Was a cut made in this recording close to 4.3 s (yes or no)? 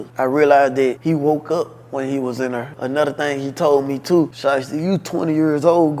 yes